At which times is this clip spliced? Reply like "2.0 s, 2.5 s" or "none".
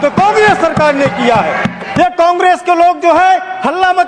1.8 s